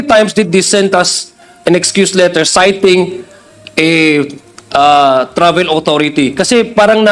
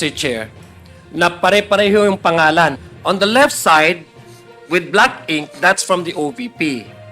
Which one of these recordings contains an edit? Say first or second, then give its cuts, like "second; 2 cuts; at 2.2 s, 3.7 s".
second; 1 cut; at 2.9 s